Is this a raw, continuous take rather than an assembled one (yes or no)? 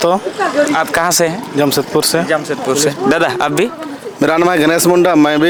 yes